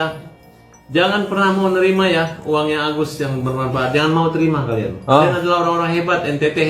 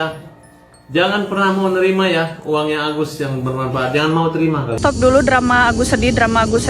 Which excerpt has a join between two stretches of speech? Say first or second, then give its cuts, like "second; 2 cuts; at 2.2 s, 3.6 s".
second; 1 cut; at 4.8 s